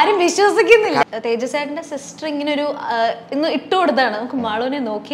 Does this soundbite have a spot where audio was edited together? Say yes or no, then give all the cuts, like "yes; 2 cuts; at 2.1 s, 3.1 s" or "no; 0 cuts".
yes; 1 cut; at 1.0 s